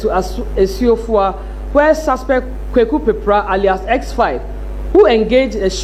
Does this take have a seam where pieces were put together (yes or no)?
no